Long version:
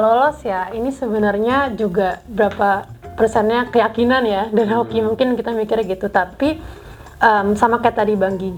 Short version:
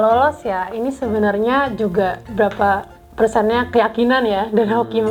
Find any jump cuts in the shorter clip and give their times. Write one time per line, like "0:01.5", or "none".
none